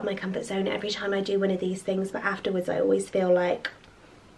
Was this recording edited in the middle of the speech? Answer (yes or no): no